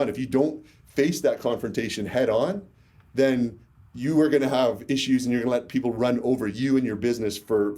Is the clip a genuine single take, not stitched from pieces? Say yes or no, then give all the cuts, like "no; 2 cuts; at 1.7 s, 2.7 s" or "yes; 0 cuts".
yes; 0 cuts